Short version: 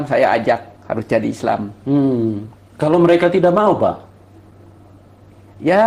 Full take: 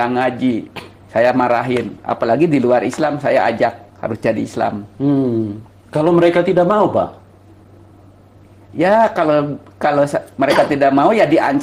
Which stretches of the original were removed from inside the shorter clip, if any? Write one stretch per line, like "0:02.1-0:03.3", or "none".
none